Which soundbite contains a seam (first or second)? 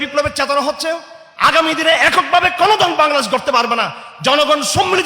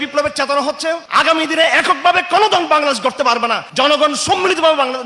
second